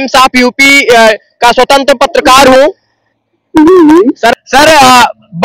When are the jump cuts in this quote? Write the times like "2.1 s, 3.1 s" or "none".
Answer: 4.4 s